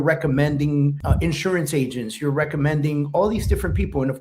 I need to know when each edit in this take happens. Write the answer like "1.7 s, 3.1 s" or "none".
1.0 s